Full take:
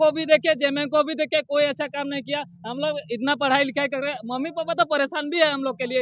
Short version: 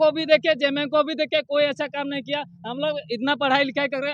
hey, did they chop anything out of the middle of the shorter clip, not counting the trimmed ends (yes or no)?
no